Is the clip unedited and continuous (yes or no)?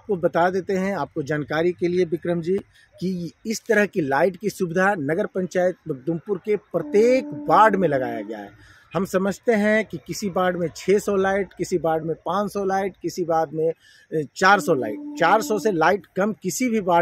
yes